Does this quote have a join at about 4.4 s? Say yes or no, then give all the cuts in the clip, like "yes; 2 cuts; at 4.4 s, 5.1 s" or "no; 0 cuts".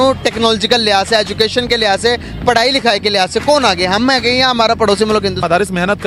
no; 0 cuts